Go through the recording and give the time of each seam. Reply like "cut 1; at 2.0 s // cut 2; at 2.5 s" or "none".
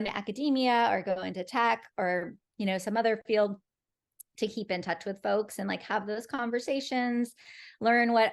none